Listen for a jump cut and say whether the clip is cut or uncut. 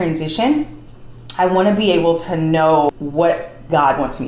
cut